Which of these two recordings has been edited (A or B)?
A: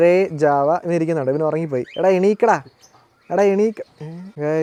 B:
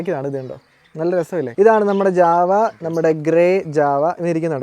B